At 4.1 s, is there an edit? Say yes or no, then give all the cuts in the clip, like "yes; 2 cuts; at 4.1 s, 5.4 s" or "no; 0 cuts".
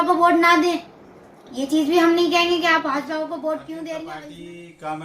yes; 1 cut; at 4.1 s